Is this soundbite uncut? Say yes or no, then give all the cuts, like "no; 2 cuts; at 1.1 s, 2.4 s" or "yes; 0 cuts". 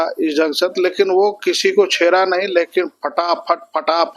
yes; 0 cuts